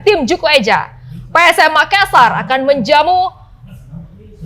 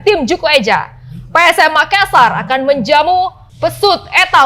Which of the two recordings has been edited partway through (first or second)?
second